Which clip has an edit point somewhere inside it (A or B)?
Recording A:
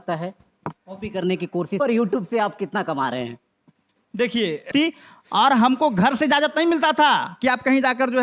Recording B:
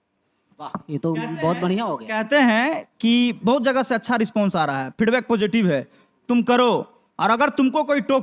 A